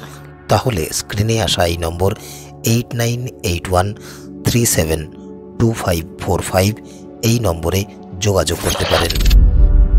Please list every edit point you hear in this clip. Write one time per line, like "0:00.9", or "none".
0:09.1